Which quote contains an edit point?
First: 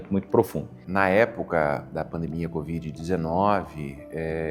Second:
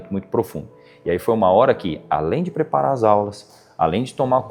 first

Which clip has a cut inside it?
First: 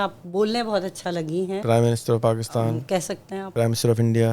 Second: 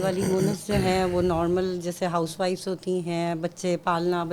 first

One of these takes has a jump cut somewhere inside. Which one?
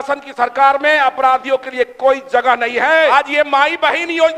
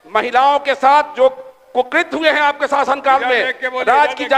first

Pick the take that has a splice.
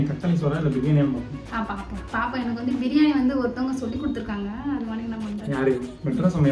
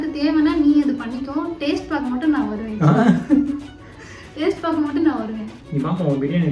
second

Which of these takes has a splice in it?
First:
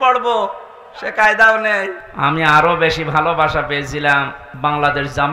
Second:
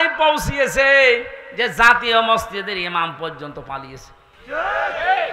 first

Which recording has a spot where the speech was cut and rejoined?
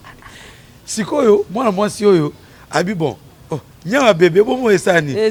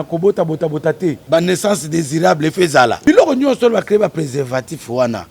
second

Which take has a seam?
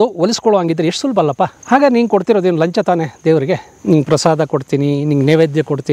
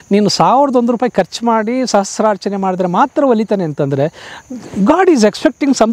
first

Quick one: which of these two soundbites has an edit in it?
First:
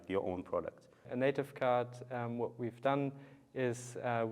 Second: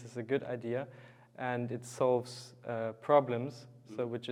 first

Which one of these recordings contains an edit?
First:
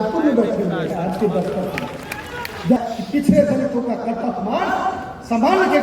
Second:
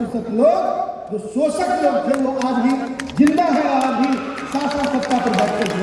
first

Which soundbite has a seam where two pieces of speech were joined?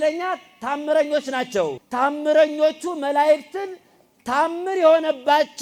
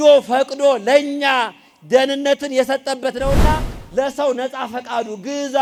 first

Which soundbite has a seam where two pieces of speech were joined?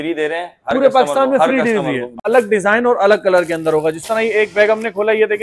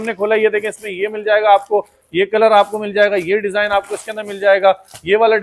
first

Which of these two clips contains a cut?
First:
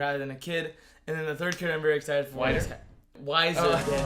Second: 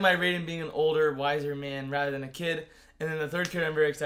first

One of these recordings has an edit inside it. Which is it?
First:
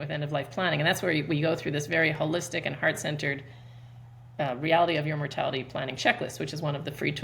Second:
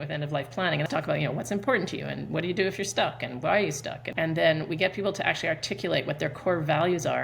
second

